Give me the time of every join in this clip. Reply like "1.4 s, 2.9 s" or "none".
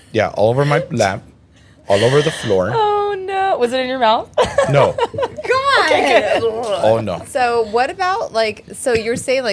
7.2 s